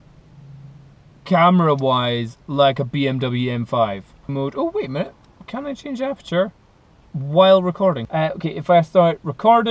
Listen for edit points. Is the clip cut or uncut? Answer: cut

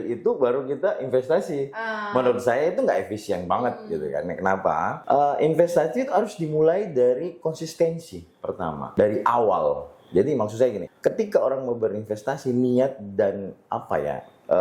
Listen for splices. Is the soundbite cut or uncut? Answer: cut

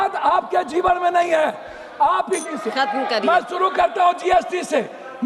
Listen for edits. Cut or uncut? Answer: cut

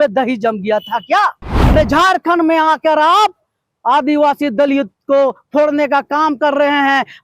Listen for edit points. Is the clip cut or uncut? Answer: cut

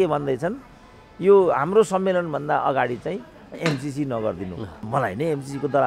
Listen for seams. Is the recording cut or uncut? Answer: cut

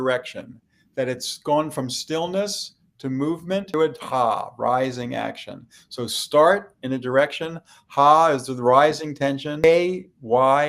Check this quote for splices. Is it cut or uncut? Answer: cut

